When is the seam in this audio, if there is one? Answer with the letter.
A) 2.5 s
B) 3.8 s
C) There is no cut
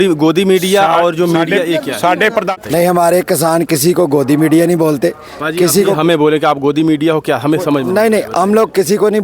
A